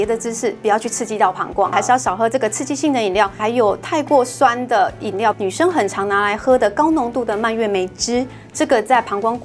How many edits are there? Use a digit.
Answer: 3